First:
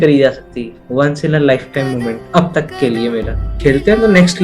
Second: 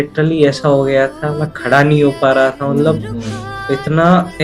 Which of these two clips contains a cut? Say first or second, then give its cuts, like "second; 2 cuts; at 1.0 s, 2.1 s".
first; 1 cut; at 3.5 s